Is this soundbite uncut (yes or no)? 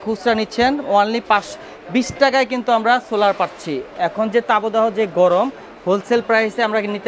yes